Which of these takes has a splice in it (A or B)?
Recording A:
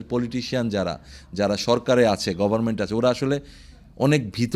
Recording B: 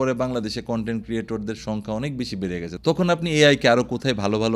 B